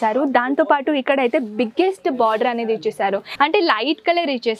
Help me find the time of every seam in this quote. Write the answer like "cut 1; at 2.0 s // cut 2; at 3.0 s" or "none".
cut 1; at 3.3 s